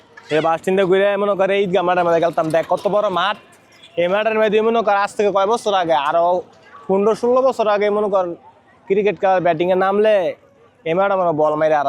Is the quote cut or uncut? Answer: uncut